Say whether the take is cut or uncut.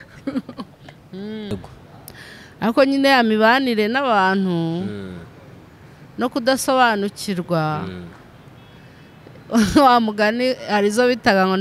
cut